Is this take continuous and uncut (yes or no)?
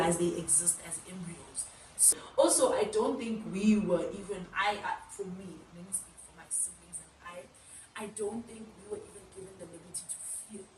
no